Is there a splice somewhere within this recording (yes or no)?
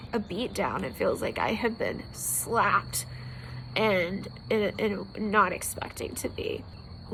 no